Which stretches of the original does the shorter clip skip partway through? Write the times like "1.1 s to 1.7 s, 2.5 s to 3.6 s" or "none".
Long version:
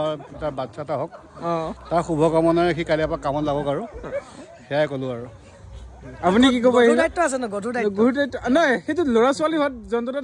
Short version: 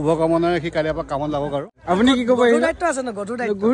3.9 s to 6.1 s